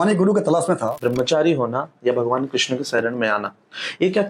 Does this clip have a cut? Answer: yes; 1 cut; at 0.9 s

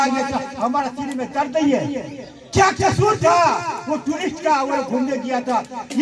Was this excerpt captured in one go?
yes; 0 cuts

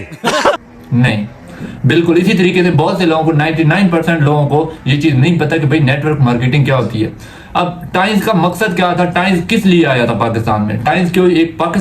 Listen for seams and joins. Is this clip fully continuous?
yes; 0 cuts

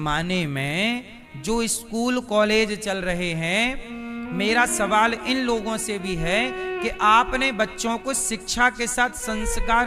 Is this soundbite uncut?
yes; 0 cuts

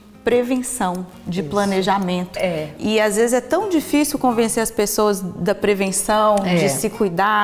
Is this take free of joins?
yes; 0 cuts

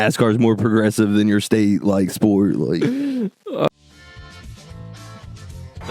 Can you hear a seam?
yes; 1 cut; at 3.7 s

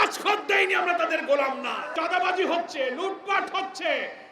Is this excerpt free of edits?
no; 1 cut; at 1.9 s

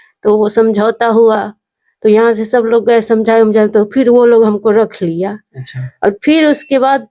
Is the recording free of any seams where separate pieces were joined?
yes; 0 cuts

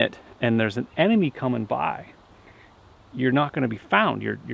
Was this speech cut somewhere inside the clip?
no; 0 cuts

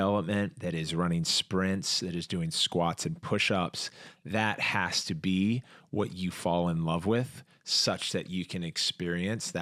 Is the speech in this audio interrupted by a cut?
no; 0 cuts

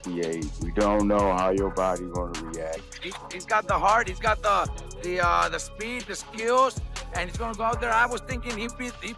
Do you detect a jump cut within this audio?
yes; 1 cut; at 2.8 s

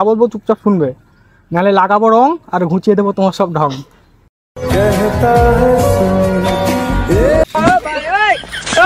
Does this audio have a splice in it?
yes; 1 cut; at 7.4 s

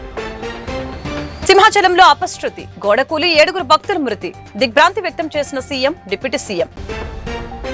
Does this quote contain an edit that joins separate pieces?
no; 0 cuts

